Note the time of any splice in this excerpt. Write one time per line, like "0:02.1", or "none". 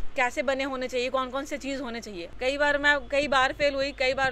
0:02.2